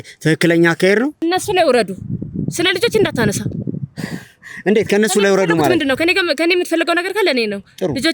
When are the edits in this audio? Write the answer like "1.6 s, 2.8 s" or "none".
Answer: 1.2 s